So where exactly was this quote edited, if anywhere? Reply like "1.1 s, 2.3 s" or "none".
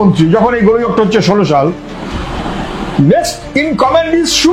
none

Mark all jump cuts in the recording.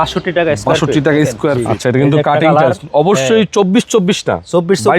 1.7 s

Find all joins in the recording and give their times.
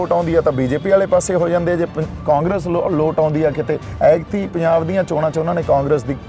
none

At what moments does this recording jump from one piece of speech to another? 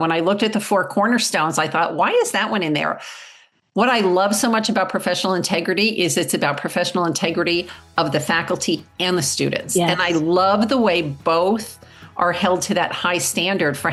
none

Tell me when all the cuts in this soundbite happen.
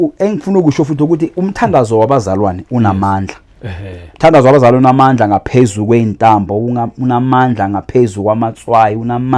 none

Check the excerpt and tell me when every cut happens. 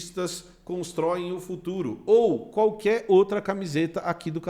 none

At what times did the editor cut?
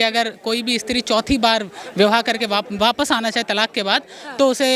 none

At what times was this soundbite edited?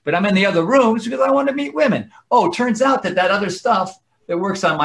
none

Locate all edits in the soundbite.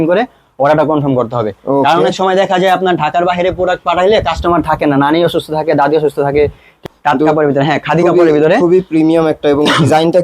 6.8 s

